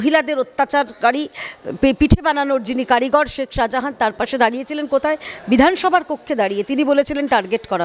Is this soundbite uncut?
yes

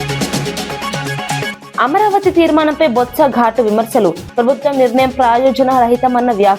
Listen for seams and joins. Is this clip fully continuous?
yes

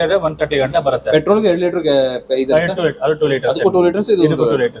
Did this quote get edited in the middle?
no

